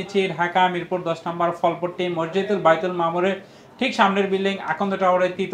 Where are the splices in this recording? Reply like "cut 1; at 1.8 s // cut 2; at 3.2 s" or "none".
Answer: none